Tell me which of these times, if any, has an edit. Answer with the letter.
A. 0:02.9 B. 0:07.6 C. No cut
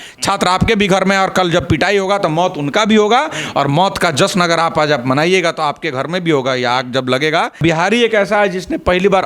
B